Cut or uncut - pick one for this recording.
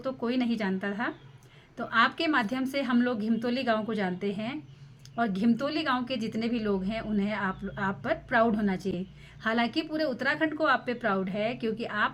uncut